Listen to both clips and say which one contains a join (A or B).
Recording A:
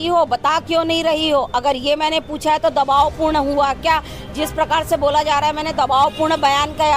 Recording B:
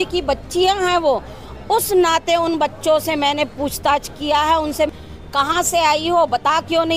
B